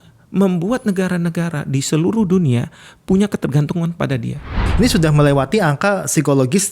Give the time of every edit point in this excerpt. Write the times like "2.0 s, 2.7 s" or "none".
4.6 s